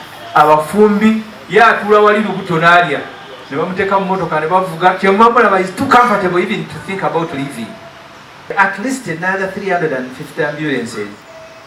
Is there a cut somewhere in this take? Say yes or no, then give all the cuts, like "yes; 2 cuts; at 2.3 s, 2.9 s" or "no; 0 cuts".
yes; 1 cut; at 8.5 s